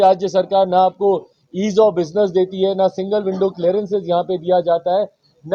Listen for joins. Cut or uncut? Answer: uncut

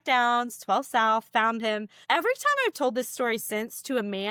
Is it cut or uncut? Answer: uncut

